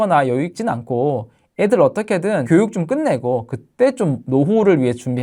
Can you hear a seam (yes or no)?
yes